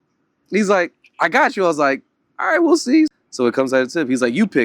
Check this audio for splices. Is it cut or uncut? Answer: cut